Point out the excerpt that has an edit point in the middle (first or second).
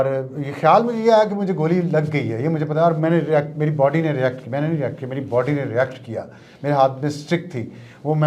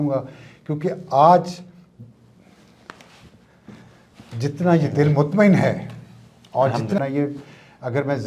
second